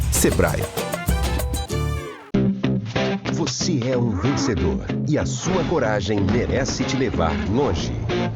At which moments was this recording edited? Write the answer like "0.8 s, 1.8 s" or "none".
2.2 s

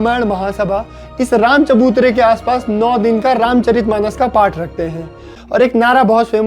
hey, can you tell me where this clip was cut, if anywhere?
5.4 s

